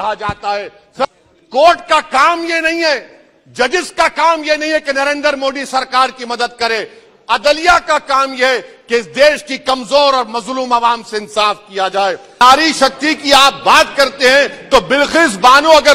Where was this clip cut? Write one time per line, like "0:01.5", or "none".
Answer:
0:01.1
0:12.4